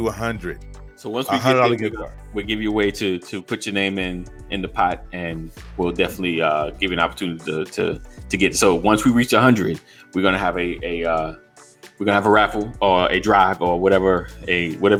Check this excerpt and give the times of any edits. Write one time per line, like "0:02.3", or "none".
none